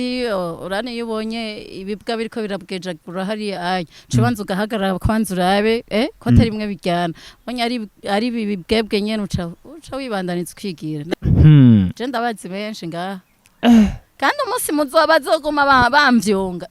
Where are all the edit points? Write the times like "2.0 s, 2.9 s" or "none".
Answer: 11.1 s